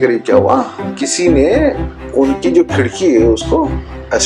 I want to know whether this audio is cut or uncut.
cut